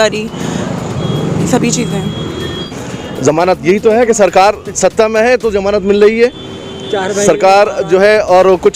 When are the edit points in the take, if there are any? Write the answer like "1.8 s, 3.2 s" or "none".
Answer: 2.7 s

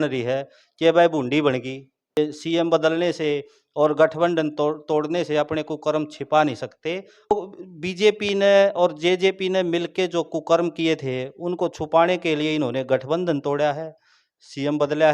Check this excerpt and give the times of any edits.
2.0 s, 7.3 s

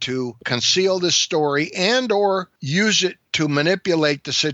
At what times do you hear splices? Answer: 3.0 s

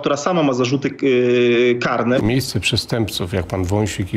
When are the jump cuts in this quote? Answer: 2.2 s

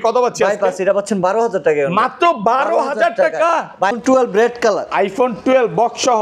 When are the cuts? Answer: 3.9 s

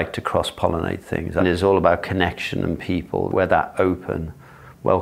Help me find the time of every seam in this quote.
1.4 s, 3.3 s

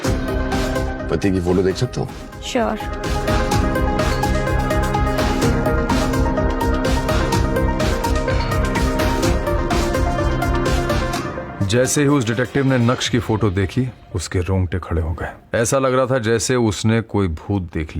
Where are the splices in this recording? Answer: none

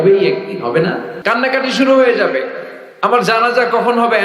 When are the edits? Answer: 1.1 s

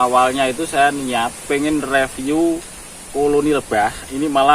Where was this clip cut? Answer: 1.5 s

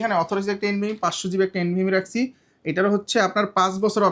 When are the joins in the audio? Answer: none

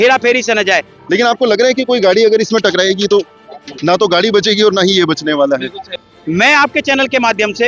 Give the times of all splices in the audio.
0.9 s, 6.0 s

